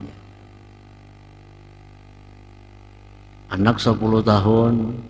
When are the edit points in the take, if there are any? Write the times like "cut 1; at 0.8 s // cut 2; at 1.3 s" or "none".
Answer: none